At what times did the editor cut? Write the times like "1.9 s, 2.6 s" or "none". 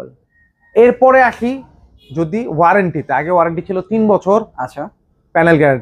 none